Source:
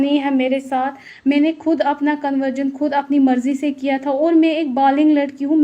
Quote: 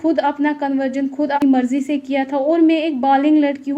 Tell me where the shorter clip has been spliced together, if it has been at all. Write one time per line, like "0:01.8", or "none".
0:01.4